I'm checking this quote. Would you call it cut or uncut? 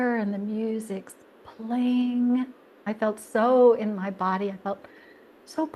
cut